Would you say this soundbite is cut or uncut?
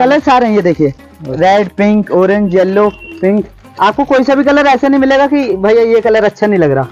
uncut